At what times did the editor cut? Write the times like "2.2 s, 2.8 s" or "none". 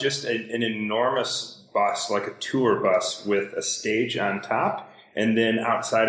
none